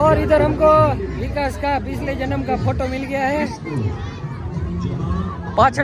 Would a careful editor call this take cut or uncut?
uncut